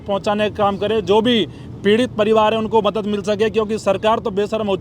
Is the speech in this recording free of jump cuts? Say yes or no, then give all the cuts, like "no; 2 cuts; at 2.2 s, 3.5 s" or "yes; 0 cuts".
yes; 0 cuts